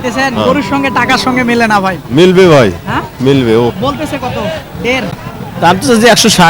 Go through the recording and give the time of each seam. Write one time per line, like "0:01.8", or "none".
0:05.2